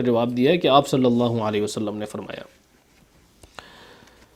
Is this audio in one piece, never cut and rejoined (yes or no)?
yes